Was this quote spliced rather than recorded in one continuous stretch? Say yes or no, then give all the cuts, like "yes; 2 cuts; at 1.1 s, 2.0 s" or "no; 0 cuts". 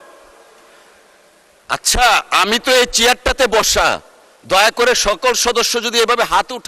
no; 0 cuts